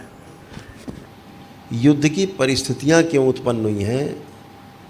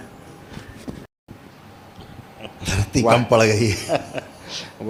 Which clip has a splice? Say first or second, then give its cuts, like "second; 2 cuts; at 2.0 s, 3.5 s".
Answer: first; 1 cut; at 1.1 s